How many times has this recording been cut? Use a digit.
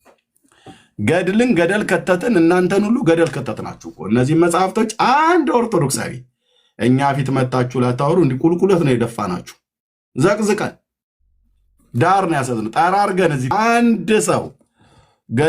1